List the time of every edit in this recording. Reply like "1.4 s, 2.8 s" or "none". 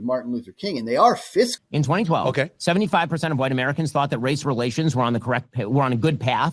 1.6 s